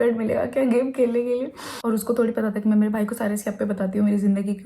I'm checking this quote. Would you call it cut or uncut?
cut